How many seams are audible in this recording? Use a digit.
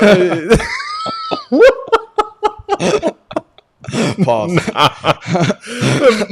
0